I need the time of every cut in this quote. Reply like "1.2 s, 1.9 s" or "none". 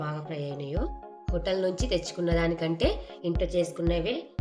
1.1 s